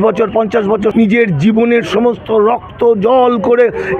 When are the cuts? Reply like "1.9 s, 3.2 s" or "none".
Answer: 0.9 s